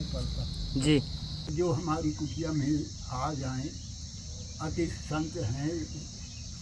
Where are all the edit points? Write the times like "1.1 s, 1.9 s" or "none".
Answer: 1.5 s